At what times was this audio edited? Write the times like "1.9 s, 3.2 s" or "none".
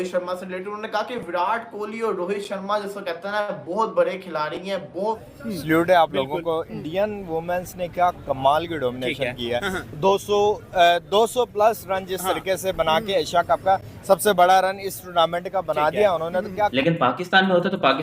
5.2 s, 16.7 s